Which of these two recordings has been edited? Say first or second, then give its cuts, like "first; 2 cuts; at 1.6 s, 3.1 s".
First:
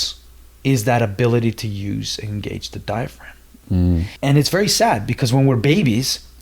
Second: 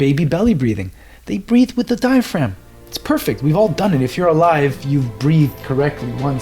first; 1 cut; at 4.1 s